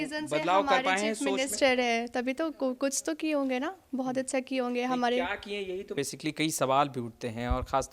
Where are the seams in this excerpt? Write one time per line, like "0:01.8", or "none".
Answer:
0:05.9